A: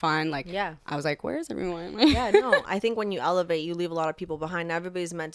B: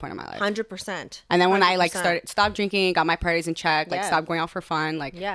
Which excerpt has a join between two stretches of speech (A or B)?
A